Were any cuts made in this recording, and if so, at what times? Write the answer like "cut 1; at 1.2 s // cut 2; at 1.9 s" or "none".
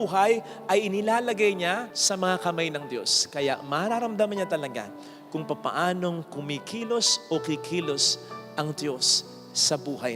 none